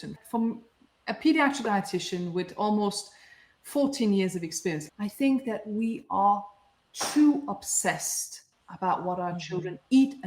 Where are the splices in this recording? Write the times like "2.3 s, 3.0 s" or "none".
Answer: 4.9 s